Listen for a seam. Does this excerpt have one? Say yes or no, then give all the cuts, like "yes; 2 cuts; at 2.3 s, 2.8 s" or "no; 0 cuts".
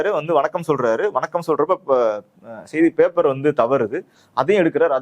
no; 0 cuts